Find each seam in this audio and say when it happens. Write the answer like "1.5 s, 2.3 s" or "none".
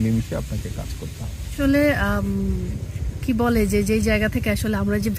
1.5 s